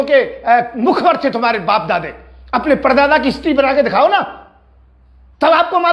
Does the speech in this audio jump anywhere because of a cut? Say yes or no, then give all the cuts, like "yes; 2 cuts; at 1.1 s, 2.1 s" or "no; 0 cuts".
no; 0 cuts